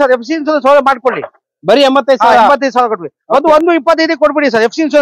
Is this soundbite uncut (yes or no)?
yes